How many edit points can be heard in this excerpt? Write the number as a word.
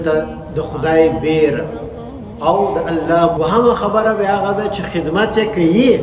one